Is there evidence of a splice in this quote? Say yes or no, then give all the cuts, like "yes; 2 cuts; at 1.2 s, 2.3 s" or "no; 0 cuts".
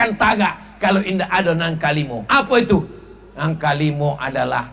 no; 0 cuts